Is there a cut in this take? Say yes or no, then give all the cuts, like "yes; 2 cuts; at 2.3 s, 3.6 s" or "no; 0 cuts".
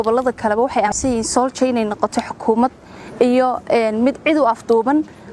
yes; 1 cut; at 0.9 s